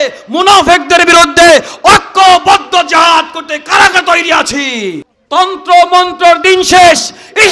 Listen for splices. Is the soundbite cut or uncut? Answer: cut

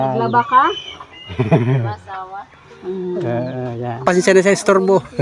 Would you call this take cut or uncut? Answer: cut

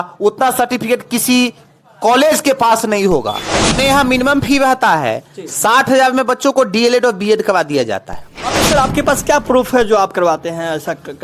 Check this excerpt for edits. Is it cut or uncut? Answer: cut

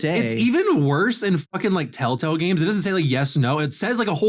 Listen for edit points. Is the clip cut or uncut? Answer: uncut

